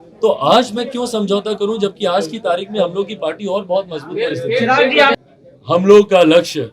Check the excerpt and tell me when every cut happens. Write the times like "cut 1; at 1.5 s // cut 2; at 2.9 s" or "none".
cut 1; at 5.2 s